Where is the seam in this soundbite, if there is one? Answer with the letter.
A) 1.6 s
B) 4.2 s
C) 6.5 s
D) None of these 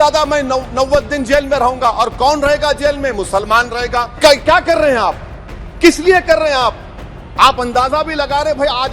B